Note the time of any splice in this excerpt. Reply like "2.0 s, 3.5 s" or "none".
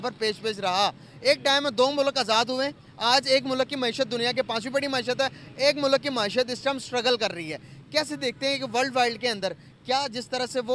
none